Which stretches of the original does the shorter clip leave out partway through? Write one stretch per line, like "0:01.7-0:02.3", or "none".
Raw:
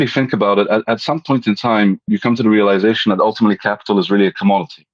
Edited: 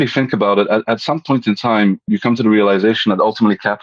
none